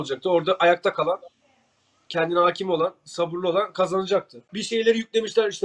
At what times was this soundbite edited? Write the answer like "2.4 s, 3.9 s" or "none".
4.4 s

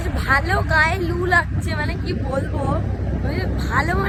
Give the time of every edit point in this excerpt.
none

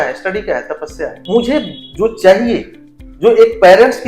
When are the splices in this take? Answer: 1.1 s

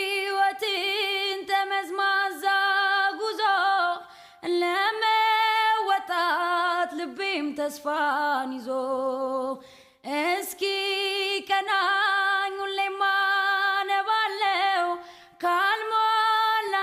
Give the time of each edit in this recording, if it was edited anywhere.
none

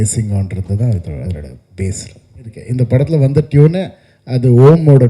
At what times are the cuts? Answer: 2.6 s

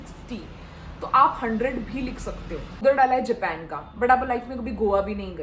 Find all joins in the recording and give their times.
2.8 s

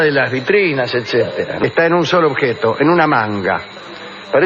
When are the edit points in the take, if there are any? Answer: none

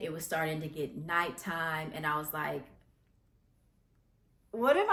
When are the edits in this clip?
none

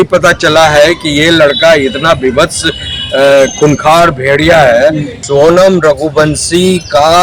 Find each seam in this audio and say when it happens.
5.2 s

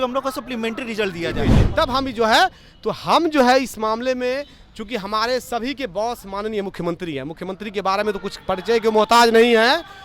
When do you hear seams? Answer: 1.6 s

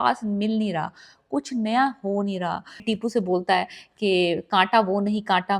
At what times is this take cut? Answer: 2.8 s

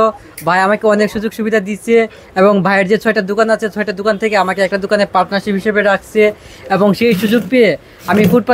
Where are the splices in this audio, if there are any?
none

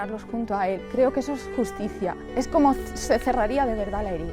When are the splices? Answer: 2.2 s

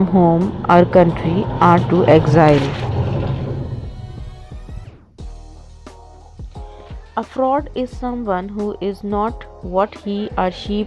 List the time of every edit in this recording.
4.0 s, 7.2 s

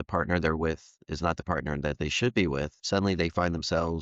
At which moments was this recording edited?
2.8 s

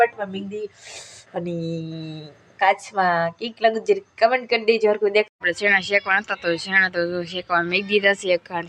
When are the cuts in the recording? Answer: 5.3 s

